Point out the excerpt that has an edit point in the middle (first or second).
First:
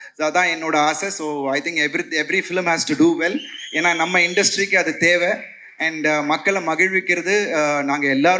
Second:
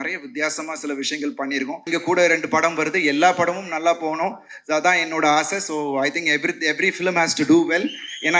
second